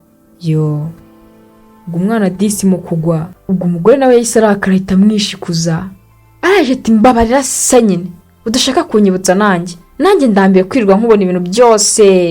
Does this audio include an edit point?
yes; 1 cut; at 3.3 s

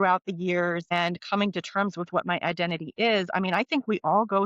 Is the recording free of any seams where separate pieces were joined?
no; 1 cut; at 0.9 s

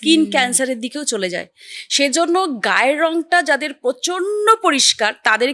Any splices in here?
no; 0 cuts

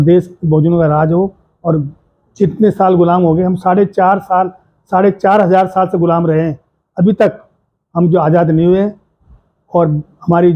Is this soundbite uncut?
yes; 0 cuts

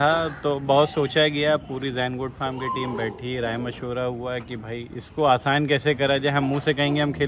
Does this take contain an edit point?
no; 0 cuts

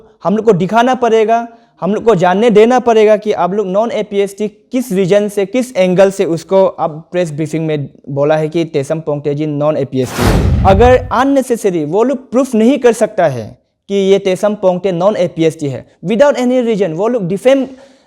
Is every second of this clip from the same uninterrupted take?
no; 1 cut; at 10.4 s

